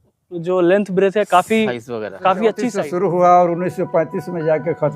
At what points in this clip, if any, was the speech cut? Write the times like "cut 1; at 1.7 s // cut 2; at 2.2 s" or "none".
cut 1; at 2.8 s